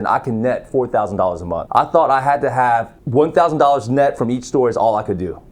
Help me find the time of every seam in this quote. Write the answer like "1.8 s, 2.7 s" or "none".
1.6 s, 3.0 s

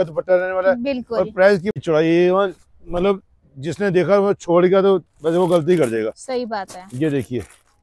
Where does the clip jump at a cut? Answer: 1.8 s

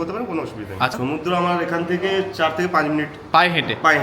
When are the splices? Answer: 0.9 s

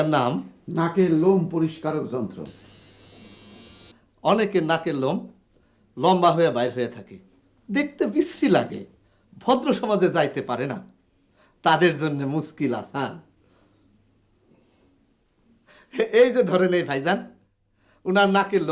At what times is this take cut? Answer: 3.9 s

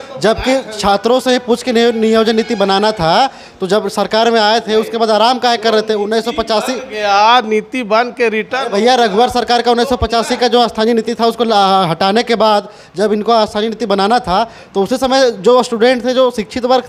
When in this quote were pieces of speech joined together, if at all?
none

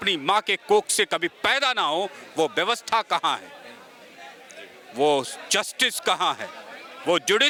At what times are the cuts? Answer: none

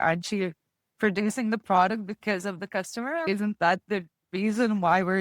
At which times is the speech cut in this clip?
3.2 s

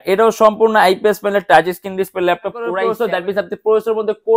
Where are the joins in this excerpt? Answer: 2.8 s

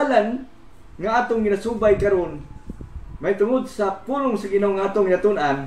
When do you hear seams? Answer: none

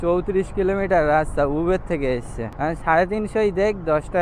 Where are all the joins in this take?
2.4 s

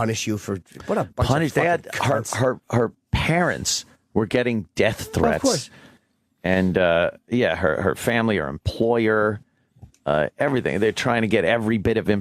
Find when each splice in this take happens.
3.1 s

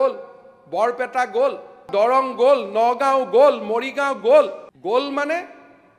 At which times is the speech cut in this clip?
1.9 s, 4.7 s

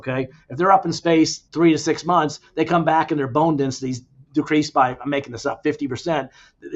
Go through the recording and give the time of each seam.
1.4 s

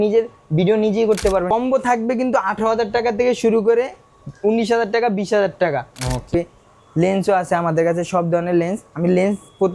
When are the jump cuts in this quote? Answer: 1.5 s, 6.3 s

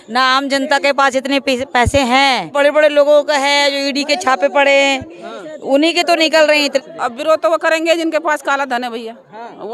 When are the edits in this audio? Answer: 2.5 s, 6.8 s

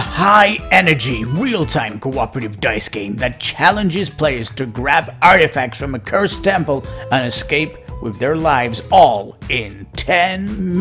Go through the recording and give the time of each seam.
none

